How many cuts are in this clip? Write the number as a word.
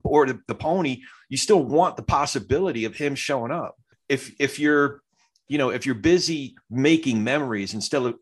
one